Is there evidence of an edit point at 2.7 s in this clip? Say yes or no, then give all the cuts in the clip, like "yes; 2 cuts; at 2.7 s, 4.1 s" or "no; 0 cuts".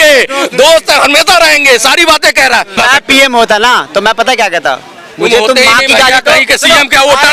yes; 1 cut; at 2.7 s